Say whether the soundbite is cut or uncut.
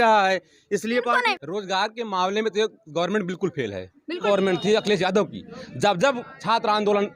cut